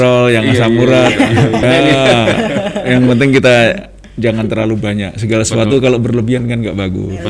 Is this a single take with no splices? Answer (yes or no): no